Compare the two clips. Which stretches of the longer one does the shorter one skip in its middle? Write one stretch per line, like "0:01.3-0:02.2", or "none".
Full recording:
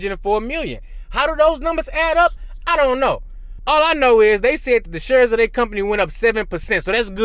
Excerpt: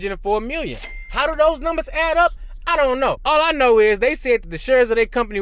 0:03.2-0:03.6